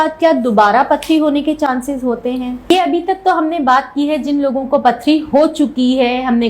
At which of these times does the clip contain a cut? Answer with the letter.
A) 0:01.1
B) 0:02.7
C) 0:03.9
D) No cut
B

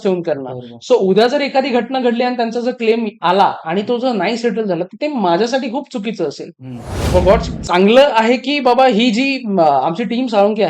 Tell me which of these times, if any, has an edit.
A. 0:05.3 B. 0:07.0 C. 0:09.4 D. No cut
B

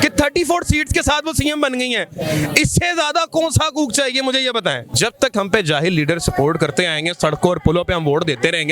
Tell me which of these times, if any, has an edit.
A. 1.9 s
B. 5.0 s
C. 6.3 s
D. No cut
B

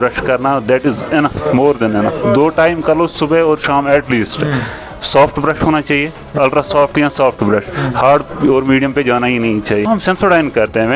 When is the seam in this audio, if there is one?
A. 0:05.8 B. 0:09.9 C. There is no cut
B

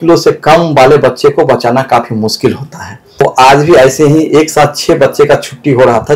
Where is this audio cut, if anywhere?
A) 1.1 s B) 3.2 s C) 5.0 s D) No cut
B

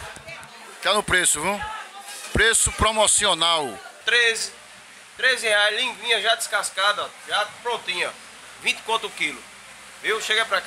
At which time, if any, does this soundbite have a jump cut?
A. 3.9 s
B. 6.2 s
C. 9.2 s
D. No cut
A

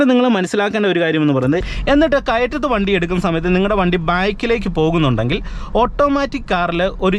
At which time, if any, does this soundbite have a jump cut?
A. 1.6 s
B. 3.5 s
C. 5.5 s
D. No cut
A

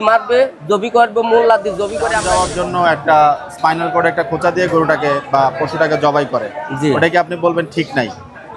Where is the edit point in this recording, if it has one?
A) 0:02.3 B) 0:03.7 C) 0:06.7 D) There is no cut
A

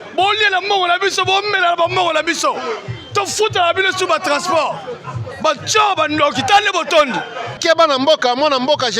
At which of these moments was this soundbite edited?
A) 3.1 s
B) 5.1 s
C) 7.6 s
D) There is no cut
C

